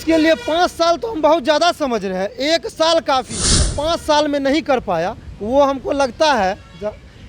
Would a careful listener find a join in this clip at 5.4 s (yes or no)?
no